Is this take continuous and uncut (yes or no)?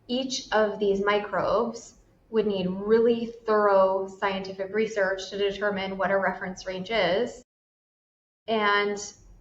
no